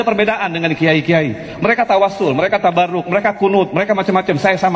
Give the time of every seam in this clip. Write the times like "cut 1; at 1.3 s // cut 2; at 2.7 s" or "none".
none